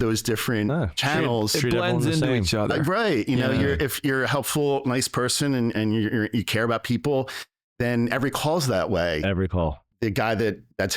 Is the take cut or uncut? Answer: cut